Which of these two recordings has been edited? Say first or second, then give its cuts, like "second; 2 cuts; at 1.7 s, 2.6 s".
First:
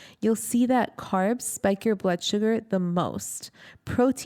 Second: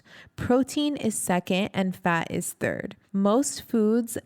second; 1 cut; at 2.9 s